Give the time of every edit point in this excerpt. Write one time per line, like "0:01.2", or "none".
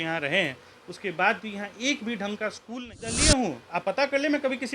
0:03.0